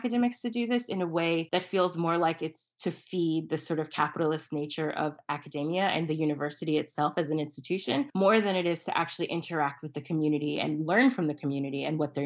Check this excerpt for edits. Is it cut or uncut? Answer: cut